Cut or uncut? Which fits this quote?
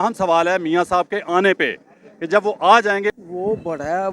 cut